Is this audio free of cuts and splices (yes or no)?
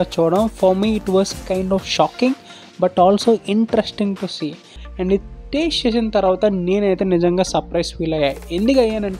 no